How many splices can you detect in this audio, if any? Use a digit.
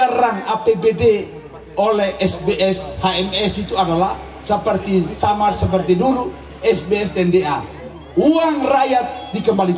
0